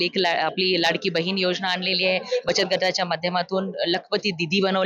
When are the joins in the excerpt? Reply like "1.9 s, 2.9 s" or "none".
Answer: none